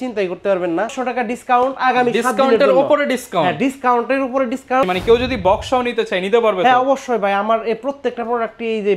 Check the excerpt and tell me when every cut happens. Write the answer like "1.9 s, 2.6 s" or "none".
1.0 s, 4.8 s